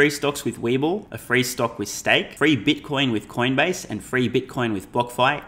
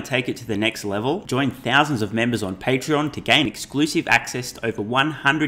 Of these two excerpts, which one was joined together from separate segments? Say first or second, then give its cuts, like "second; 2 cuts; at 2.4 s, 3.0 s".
first; 2 cuts; at 1.1 s, 2.3 s